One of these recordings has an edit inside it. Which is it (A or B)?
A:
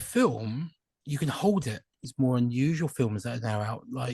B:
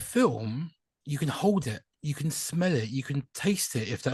A